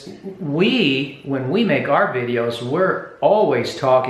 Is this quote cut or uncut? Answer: uncut